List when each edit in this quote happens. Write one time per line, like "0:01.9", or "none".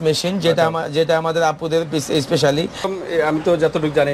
0:02.9